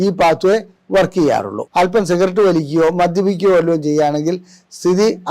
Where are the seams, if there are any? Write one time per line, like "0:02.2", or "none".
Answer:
0:01.6